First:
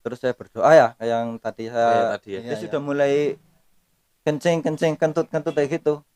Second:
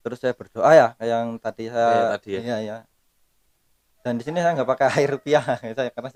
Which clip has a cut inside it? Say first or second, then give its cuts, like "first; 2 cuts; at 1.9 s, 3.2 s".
first; 1 cut; at 2.6 s